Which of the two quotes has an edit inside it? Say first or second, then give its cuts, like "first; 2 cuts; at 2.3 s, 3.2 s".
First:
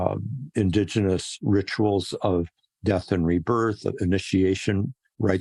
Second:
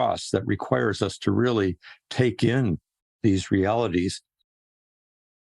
second; 1 cut; at 3.1 s